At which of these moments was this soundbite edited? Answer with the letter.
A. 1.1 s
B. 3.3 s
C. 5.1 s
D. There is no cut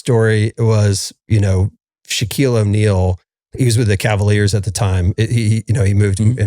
D